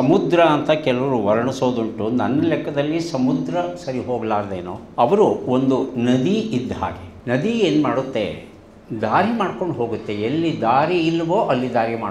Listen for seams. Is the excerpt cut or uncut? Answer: cut